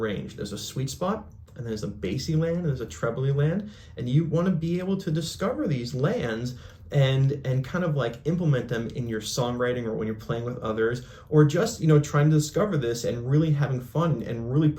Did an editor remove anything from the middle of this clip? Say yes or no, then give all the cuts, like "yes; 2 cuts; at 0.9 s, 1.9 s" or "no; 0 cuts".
no; 0 cuts